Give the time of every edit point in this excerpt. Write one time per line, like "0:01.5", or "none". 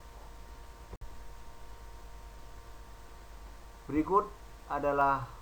0:01.0